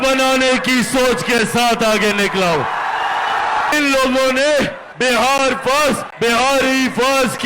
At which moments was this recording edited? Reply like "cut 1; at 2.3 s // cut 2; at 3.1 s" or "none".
cut 1; at 3.7 s // cut 2; at 4.8 s // cut 3; at 6.1 s